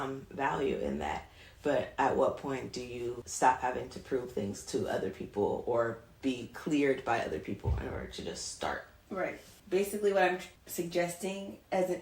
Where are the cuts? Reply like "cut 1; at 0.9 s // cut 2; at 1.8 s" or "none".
cut 1; at 3.2 s // cut 2; at 9.3 s // cut 3; at 10.6 s

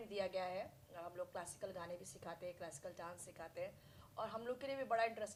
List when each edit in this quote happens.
none

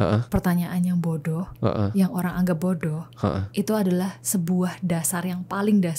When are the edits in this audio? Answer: none

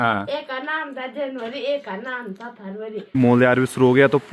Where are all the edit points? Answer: cut 1; at 3.0 s

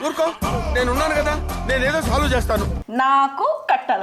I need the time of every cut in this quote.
cut 1; at 2.8 s

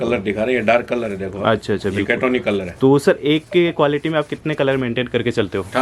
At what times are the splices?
none

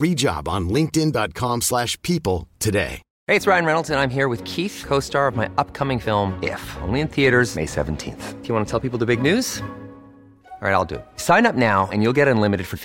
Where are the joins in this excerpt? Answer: cut 1; at 3.1 s

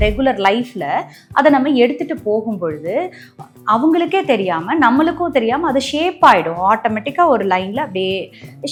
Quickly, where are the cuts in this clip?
none

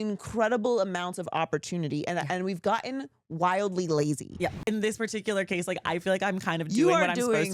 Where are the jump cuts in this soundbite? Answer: cut 1; at 4.6 s

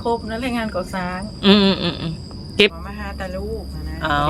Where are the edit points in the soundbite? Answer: cut 1; at 2.8 s

